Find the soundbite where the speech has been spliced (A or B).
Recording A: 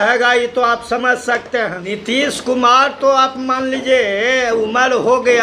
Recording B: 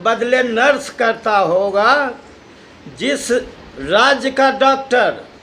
A